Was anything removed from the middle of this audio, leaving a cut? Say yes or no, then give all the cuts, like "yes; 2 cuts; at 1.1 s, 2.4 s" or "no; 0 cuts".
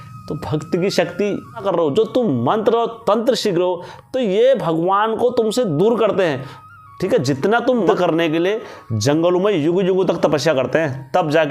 yes; 2 cuts; at 1.6 s, 7.9 s